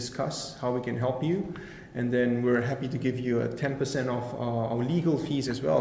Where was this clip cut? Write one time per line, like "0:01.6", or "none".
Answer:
none